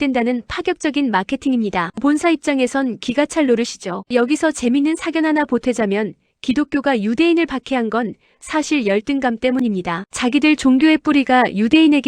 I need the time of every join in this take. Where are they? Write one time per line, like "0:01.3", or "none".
0:10.0